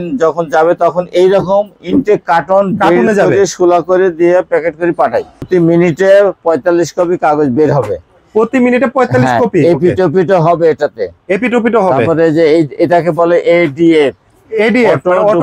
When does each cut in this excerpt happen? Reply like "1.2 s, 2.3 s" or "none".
5.5 s